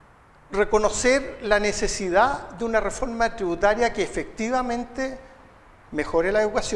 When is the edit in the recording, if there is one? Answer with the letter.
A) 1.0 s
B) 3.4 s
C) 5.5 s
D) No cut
B